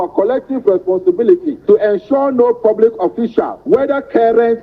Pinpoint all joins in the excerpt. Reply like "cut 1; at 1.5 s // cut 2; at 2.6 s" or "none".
cut 1; at 1.5 s // cut 2; at 3.6 s